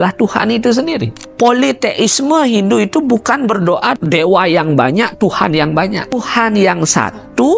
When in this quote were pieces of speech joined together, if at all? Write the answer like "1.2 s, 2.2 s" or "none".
1.2 s, 4.0 s, 6.2 s